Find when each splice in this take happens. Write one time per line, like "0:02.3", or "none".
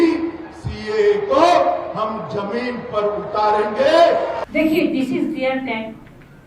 0:04.4